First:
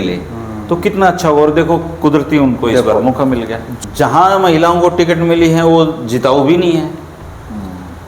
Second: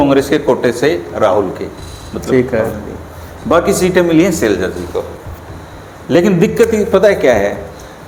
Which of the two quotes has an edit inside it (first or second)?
first